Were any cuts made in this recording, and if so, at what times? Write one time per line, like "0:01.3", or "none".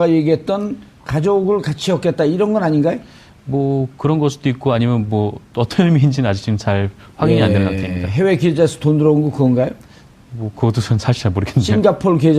0:05.0